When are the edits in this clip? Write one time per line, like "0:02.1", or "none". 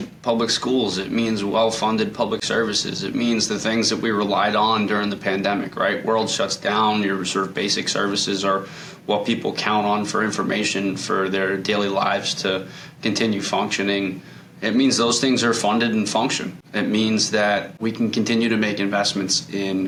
none